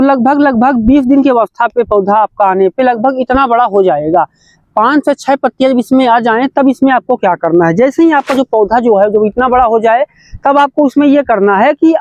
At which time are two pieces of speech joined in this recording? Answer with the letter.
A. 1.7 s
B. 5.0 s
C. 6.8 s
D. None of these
D